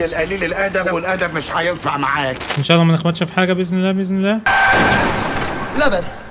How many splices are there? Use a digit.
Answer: 1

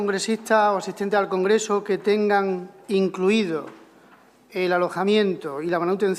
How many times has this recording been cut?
0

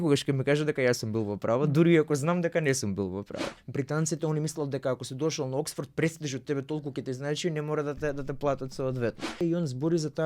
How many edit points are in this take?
2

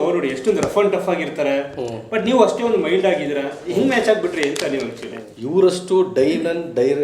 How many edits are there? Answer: 1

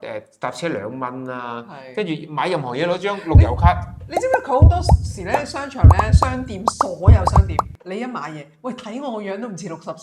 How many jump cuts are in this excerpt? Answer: 0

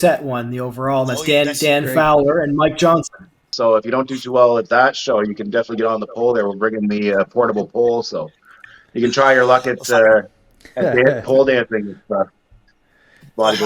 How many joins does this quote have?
1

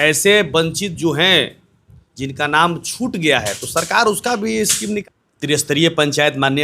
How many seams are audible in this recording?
1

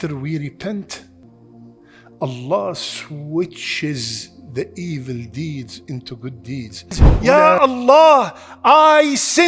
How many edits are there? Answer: 1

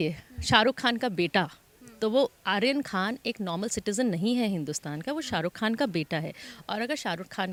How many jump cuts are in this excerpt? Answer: 0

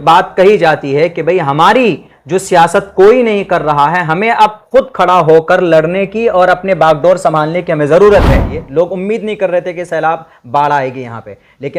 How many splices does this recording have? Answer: 1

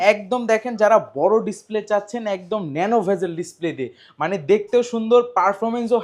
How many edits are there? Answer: 0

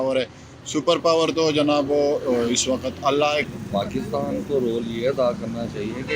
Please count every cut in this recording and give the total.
1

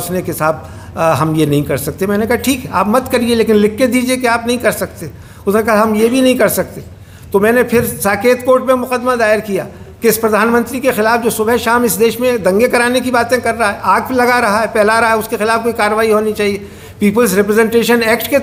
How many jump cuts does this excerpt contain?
0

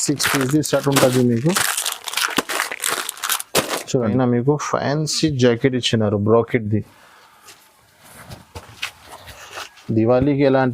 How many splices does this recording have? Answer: 1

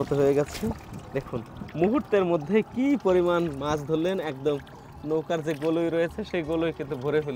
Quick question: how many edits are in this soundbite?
0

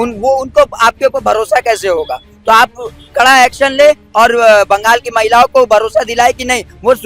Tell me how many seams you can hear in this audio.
0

